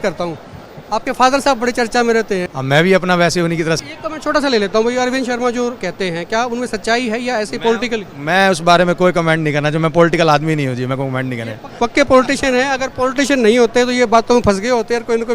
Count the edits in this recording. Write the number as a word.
two